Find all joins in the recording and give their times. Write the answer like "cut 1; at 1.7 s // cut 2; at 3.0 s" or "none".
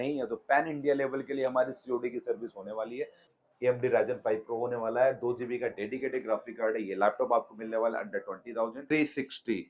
cut 1; at 3.2 s // cut 2; at 8.8 s